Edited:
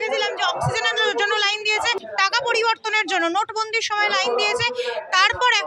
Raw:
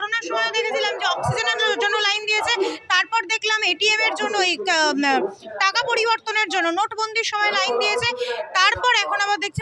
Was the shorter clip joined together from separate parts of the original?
yes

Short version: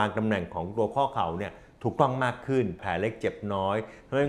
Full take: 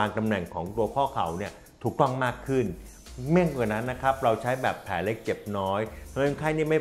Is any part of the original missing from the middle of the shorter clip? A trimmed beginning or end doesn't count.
yes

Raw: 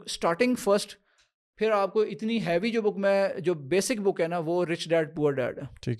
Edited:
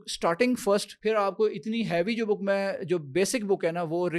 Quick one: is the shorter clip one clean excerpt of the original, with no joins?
no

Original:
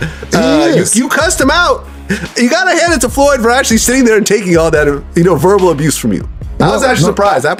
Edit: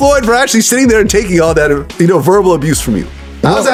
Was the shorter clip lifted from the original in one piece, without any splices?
yes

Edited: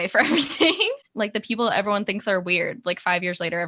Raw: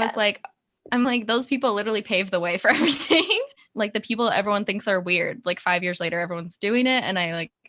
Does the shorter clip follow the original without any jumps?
no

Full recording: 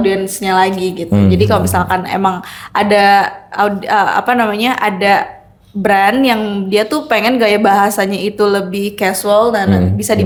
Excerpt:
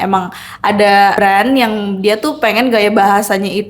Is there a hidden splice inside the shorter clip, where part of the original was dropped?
yes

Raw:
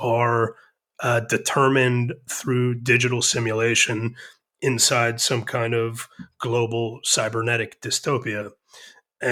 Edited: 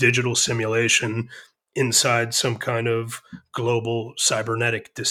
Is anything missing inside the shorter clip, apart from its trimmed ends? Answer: no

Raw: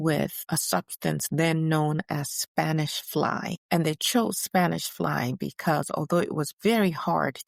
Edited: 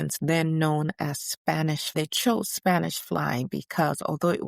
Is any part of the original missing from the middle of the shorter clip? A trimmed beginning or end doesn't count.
yes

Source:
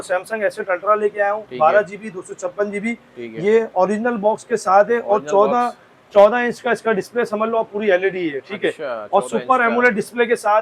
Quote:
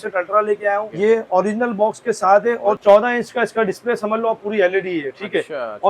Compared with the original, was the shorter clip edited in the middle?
yes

